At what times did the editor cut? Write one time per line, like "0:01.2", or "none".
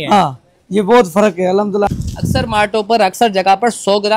0:01.9